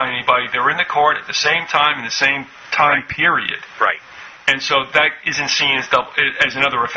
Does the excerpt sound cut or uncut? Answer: cut